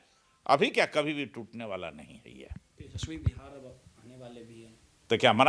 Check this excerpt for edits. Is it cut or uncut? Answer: uncut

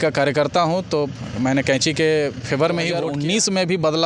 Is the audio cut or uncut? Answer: cut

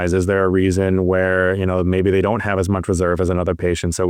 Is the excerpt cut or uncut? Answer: uncut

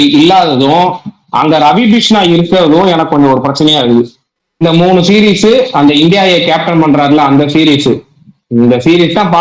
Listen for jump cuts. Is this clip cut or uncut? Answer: cut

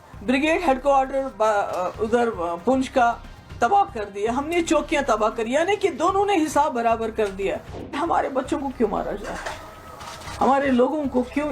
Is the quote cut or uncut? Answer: cut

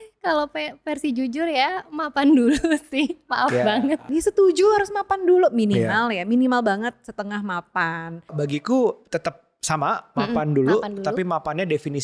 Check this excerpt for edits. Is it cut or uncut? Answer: cut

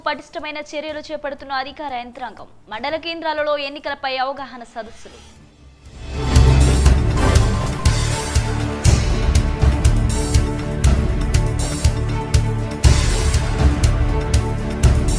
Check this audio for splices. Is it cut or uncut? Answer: uncut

